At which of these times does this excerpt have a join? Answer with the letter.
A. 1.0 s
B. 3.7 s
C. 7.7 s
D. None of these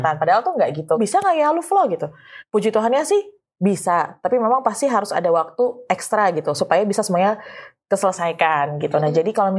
A